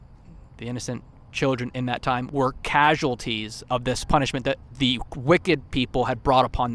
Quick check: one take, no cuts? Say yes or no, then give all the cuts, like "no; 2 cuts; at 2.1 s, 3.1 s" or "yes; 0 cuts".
yes; 0 cuts